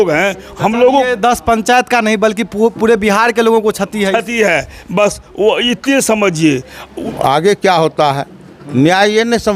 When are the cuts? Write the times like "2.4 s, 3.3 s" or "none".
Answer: 6.9 s